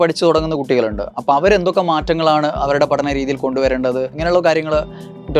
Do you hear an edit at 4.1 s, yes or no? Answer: yes